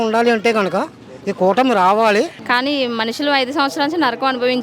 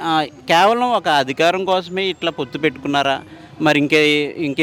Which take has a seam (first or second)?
first